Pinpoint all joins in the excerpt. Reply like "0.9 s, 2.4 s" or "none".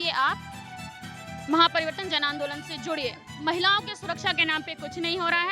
3.2 s